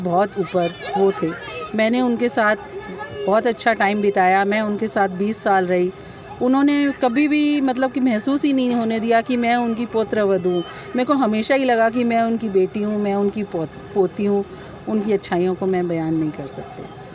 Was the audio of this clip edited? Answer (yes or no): no